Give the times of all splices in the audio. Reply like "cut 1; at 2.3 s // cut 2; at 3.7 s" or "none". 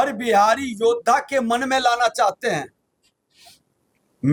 none